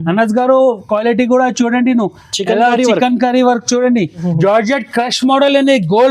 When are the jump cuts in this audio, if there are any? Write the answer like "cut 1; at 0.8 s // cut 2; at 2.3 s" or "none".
cut 1; at 4.2 s